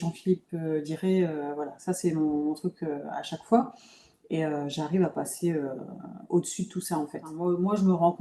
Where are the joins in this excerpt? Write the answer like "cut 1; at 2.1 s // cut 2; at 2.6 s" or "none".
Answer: cut 1; at 7.2 s